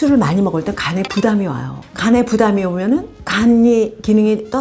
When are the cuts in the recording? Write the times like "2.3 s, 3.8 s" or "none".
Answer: none

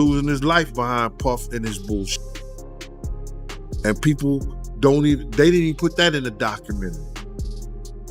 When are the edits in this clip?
2.1 s, 3.8 s, 7.2 s

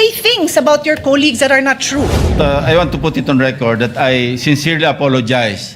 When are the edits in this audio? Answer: 2.2 s

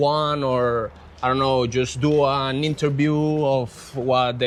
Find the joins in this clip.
none

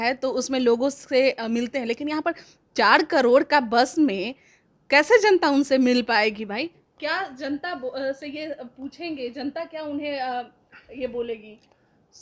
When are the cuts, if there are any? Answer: none

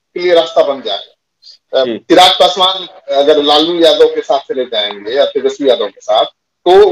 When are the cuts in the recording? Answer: 1.9 s

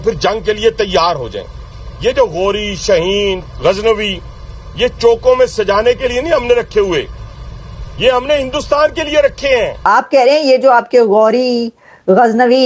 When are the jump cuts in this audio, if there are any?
9.8 s

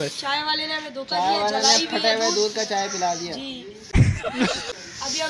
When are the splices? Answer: none

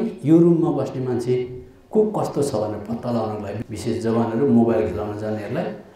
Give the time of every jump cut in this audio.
3.5 s

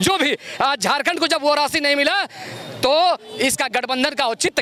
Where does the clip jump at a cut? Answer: none

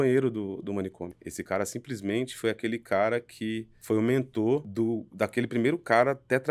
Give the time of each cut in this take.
1.2 s, 3.7 s, 4.7 s

